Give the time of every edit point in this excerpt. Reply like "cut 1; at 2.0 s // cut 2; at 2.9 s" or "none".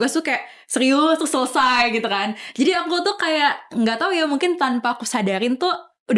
none

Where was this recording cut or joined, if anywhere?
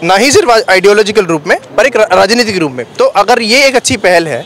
cut 1; at 2.8 s

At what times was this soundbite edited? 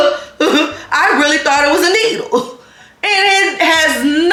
none

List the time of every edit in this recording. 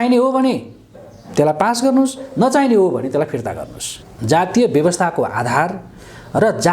cut 1; at 3.9 s

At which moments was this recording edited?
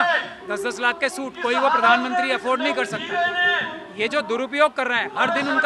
none

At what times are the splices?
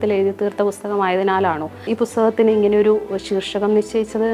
cut 1; at 1.8 s

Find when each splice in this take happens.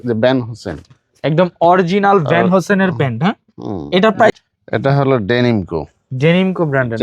cut 1; at 4.3 s

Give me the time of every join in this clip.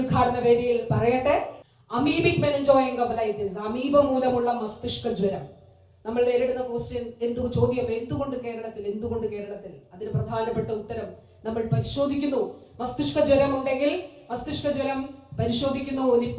cut 1; at 1.6 s

